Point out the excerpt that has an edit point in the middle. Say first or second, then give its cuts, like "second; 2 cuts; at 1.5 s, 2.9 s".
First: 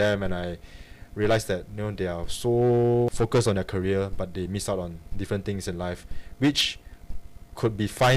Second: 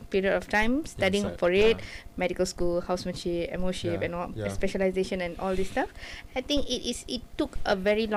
first; 1 cut; at 3.1 s